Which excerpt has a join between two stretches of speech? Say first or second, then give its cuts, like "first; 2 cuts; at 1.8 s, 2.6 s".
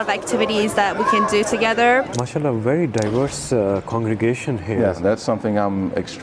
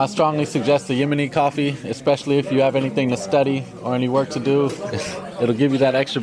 first; 2 cuts; at 2.1 s, 5.0 s